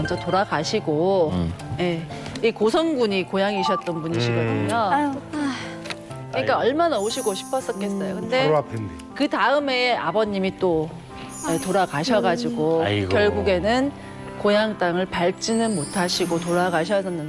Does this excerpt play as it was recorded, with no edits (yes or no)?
yes